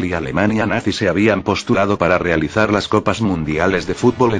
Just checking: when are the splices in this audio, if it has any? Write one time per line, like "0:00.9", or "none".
none